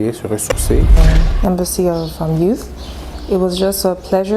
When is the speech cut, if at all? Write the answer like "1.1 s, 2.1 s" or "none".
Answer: 1.0 s